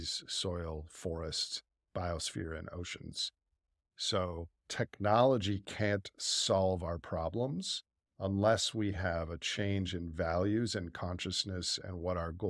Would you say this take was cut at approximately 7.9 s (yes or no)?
no